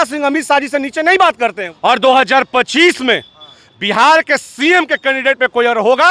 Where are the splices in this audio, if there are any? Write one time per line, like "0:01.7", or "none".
0:01.7